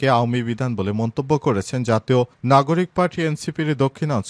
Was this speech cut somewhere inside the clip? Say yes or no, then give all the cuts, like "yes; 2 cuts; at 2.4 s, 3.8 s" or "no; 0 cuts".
no; 0 cuts